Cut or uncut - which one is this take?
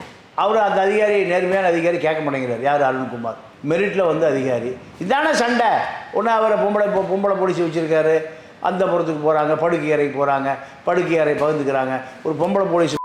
uncut